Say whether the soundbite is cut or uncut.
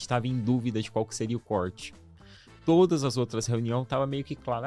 uncut